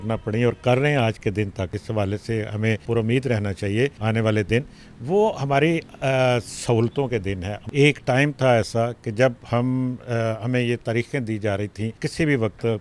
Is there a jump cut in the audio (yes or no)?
yes